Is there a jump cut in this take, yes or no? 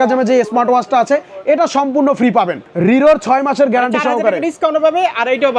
yes